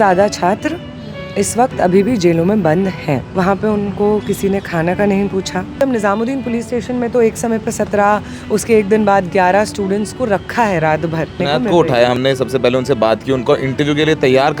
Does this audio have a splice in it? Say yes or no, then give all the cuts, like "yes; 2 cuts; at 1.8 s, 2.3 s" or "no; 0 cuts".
yes; 3 cuts; at 3.3 s, 5.8 s, 11.4 s